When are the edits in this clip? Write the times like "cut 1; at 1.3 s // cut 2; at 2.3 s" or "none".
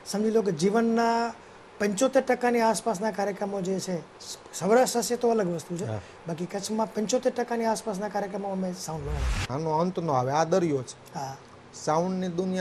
cut 1; at 9.5 s